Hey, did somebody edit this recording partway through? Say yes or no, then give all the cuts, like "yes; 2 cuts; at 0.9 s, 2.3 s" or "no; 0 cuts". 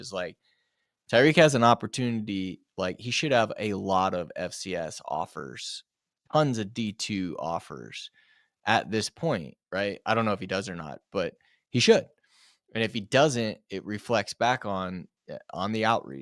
no; 0 cuts